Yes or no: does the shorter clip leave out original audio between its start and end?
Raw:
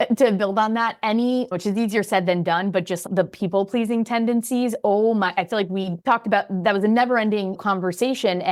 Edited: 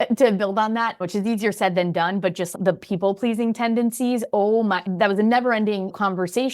yes